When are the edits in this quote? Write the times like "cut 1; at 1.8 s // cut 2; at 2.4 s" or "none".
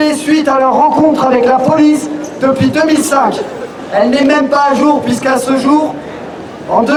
none